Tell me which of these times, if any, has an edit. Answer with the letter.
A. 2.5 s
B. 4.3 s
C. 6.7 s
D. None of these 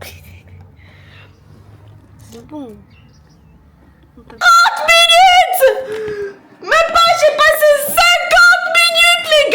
B